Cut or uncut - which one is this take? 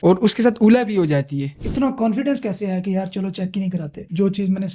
cut